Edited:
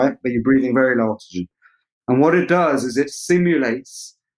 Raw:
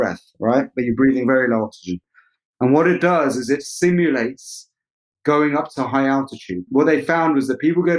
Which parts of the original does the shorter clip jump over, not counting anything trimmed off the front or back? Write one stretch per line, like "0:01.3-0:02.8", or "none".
none